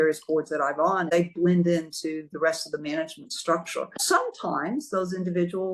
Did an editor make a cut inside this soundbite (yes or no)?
yes